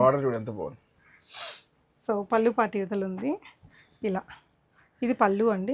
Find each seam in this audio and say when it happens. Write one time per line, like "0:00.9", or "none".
none